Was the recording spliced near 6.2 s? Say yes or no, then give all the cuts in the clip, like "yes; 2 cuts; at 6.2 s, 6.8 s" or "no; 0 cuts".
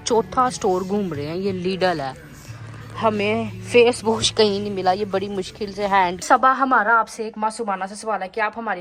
yes; 2 cuts; at 5.0 s, 6.2 s